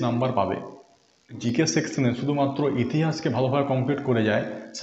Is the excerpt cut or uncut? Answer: cut